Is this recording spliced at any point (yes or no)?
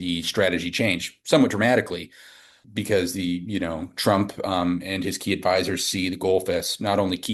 no